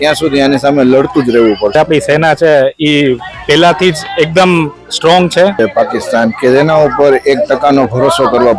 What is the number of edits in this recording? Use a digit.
2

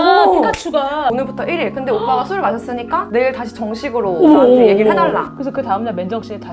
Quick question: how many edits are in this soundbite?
1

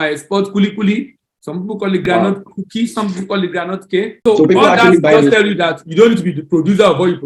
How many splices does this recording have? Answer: 1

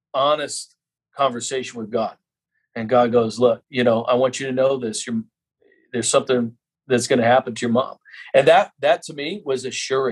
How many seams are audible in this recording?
1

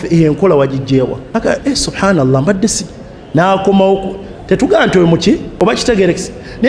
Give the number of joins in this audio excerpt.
2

